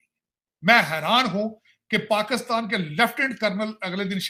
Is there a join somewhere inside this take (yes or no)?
no